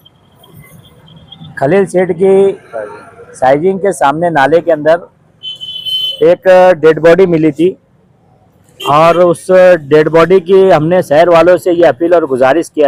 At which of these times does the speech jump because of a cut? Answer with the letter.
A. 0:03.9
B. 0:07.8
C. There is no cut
C